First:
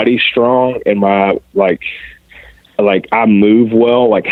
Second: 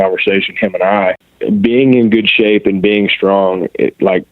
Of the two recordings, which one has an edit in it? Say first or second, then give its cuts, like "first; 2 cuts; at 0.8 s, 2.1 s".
second; 1 cut; at 1.3 s